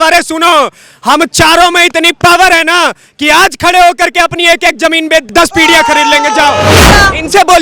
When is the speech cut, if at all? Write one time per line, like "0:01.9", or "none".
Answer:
0:05.2
0:06.9